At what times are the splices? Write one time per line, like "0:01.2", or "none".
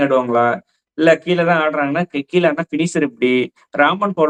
none